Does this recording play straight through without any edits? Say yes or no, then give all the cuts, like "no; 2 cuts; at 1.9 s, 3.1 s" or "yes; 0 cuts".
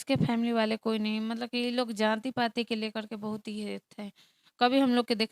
yes; 0 cuts